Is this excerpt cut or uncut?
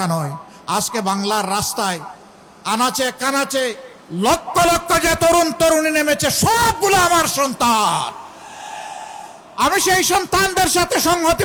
uncut